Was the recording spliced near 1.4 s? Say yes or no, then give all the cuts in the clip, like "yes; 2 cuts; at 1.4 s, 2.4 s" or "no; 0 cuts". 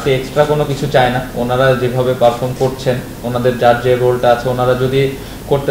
no; 0 cuts